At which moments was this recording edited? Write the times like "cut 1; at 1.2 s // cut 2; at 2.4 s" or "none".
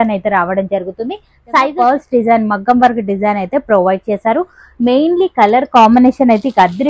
cut 1; at 1.7 s